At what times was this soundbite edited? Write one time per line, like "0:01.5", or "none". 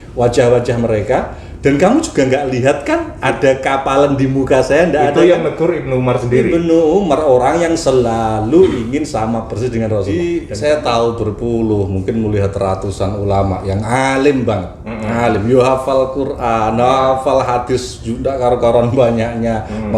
0:10.1

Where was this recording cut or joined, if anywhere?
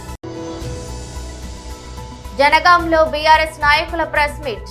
none

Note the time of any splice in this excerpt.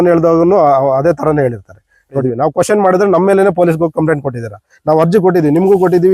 0:02.2

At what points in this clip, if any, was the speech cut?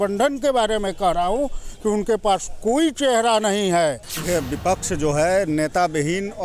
0:04.1

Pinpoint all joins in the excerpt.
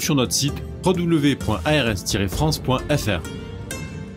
0:03.2

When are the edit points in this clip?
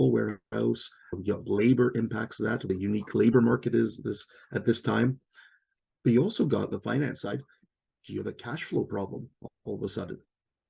0:01.2
0:02.7

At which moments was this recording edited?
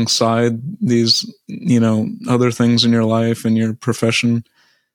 none

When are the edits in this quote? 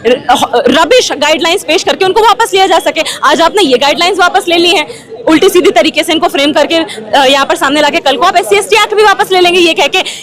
none

